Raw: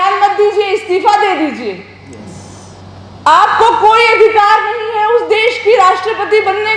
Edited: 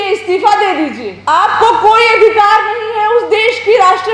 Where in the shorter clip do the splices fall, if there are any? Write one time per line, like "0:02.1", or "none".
0:01.1